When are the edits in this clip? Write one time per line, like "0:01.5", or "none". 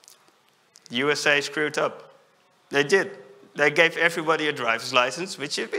none

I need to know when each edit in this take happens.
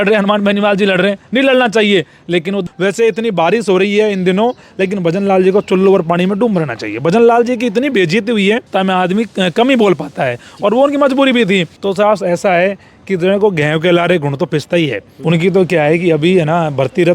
0:02.6
0:08.7
0:11.7
0:15.1

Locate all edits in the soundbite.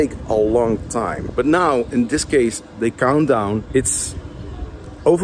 0:01.2
0:03.7

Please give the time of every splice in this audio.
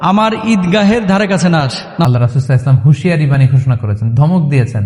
0:02.0

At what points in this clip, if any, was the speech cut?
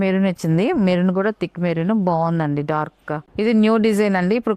0:03.3

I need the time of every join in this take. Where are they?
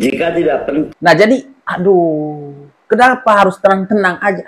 0:00.9

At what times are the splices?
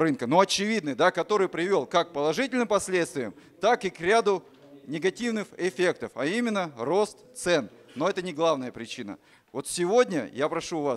none

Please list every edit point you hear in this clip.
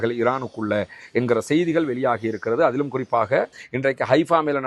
0:03.6

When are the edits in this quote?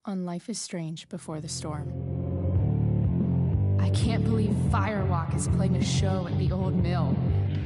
0:01.0

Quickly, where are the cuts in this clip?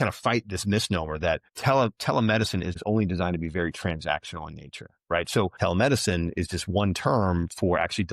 0:01.5
0:02.8
0:05.5

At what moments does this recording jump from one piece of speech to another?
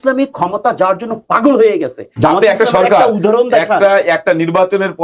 0:02.0

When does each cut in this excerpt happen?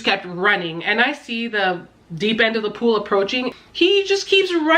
0:03.5

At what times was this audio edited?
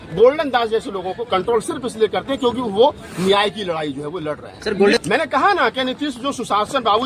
0:05.0

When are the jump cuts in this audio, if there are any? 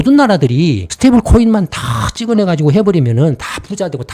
none

